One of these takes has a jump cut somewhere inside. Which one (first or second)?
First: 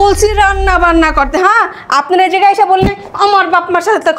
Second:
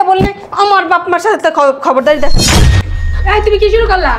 second